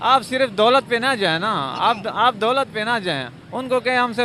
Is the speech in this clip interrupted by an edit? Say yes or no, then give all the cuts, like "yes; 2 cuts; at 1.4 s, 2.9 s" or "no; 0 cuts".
no; 0 cuts